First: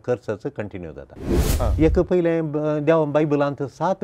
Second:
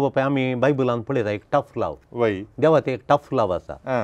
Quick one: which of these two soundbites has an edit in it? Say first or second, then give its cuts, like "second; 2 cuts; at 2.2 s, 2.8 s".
first; 1 cut; at 1.5 s